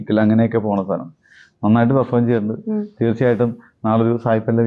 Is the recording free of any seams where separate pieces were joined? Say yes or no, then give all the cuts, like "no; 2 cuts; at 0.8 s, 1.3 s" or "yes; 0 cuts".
yes; 0 cuts